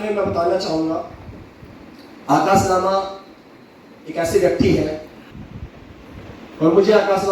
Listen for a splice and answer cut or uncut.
cut